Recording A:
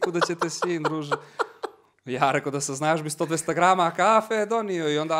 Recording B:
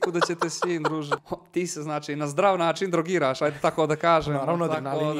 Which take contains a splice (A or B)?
B